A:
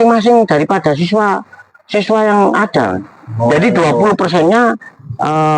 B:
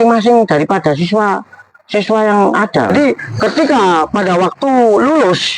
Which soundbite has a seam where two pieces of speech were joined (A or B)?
B